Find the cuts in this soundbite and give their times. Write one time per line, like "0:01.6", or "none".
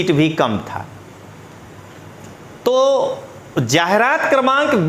none

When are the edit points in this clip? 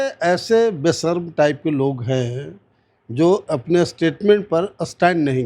0:03.4

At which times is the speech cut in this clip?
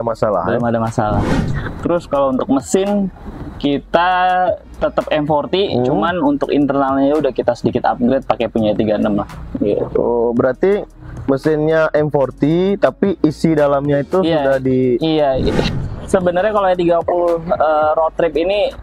0:01.4
0:15.6

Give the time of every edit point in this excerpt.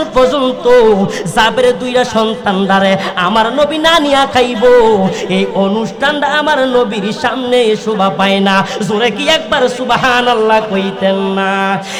none

